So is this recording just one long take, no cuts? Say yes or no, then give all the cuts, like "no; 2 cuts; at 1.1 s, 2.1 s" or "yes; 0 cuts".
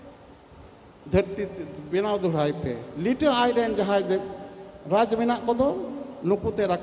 no; 1 cut; at 2.9 s